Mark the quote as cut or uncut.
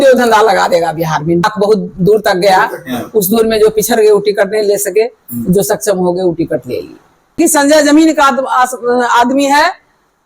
cut